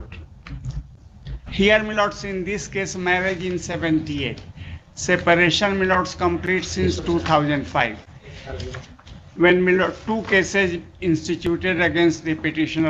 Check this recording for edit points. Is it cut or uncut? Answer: uncut